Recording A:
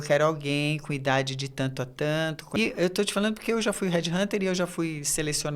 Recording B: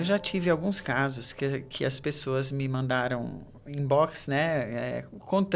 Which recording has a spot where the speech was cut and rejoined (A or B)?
A